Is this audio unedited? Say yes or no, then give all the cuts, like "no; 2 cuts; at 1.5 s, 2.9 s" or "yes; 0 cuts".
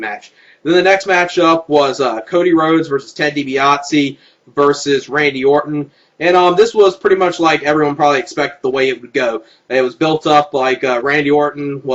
no; 1 cut; at 2.7 s